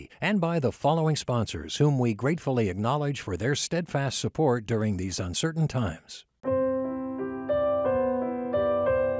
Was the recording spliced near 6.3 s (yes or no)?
yes